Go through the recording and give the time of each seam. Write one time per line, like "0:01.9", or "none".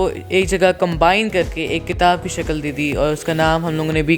none